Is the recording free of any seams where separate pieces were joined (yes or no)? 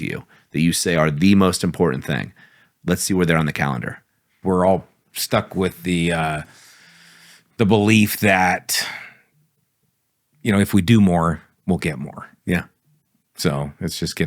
no